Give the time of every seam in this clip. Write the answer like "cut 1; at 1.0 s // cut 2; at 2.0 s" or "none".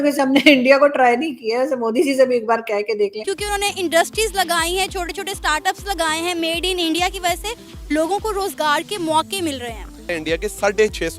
cut 1; at 3.2 s